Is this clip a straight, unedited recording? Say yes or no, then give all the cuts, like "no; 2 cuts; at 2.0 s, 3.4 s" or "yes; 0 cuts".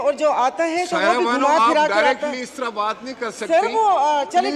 yes; 0 cuts